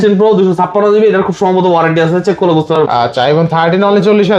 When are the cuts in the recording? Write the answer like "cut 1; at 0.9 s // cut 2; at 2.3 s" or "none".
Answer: cut 1; at 2.7 s